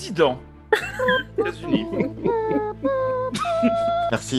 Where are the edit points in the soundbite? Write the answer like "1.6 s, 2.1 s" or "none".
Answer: none